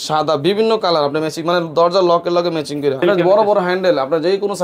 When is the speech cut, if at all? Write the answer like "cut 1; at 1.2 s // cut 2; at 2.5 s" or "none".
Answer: cut 1; at 3.0 s